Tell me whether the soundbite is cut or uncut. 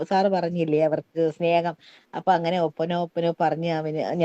uncut